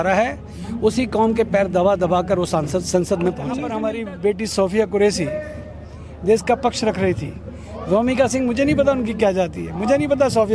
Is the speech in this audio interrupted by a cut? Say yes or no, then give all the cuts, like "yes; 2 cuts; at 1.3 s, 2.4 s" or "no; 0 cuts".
yes; 1 cut; at 3.7 s